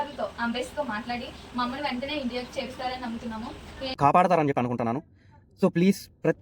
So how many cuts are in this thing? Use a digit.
1